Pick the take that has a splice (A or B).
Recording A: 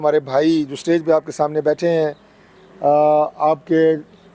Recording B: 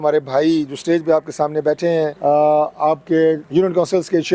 B